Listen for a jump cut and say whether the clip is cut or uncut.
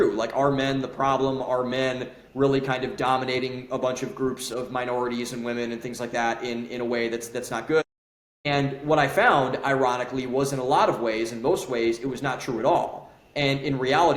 uncut